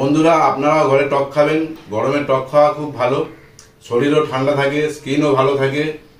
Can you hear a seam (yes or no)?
no